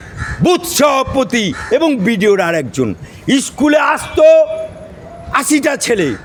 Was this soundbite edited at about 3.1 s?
no; 0 cuts

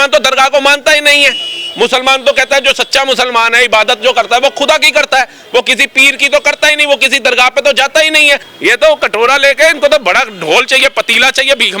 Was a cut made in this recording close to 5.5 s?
no; 1 cut; at 8.5 s

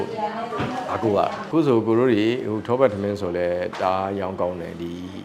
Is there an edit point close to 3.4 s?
no; 1 cut; at 1.4 s

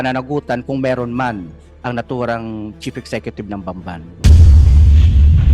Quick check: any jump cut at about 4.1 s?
yes; 1 cut; at 4.1 s

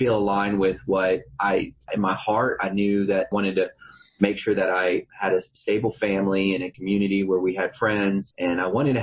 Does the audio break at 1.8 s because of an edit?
yes; 5 cuts; at 1.8 s, 3.3 s, 5.5 s, 6.8 s, 8.3 s

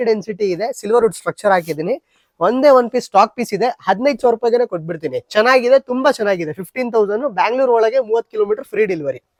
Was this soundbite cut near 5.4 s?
no; 0 cuts

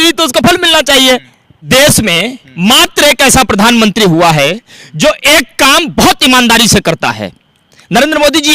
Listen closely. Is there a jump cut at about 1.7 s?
yes; 1 cut; at 1.7 s

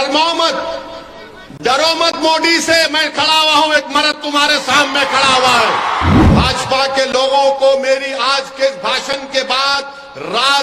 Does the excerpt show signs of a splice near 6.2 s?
yes; 1 cut; at 6.2 s

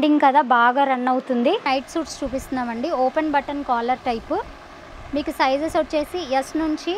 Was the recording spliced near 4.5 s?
no; 1 cut; at 1.7 s

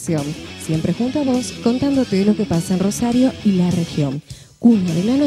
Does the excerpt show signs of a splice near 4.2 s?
no; 0 cuts

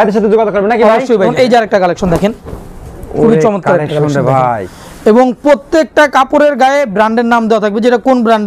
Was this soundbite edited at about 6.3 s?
no; 1 cut; at 1.3 s

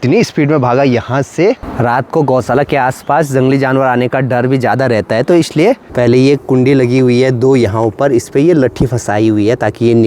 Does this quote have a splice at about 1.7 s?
yes; 2 cuts; at 1.7 s, 5.9 s

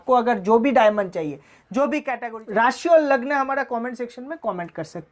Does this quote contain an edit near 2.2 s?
yes; 1 cut; at 2.2 s

